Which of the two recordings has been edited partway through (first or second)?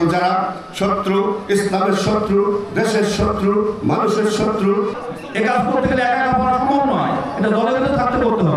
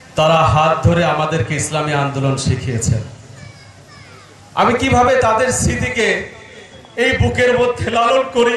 first